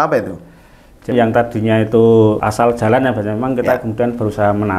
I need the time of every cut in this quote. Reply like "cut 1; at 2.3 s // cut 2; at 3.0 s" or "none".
cut 1; at 1.1 s // cut 2; at 2.4 s